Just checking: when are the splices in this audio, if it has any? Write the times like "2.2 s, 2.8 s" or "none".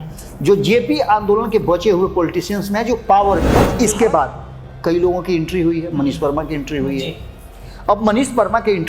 3.5 s